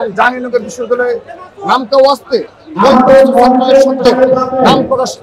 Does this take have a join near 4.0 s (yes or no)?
yes